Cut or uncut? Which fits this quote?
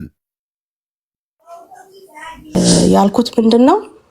cut